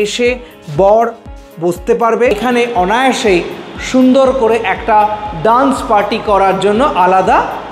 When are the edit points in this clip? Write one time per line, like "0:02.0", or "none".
0:02.3